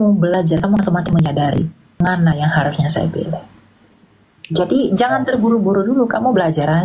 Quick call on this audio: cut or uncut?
uncut